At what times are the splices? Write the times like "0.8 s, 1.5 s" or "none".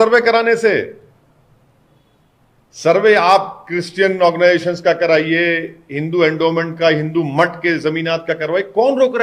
none